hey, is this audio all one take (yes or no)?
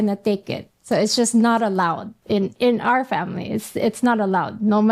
no